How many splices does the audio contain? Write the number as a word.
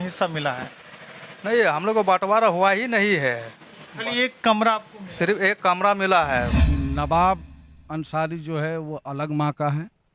one